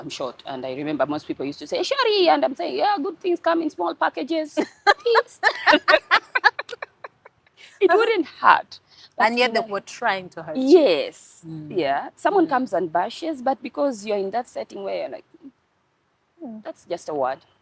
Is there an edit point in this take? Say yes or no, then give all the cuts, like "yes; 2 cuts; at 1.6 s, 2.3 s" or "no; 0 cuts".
no; 0 cuts